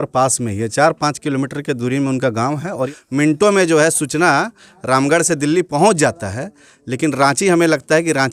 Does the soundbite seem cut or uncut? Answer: cut